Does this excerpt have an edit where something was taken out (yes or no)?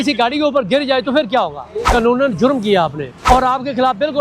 yes